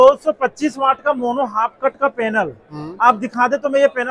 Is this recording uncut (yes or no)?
yes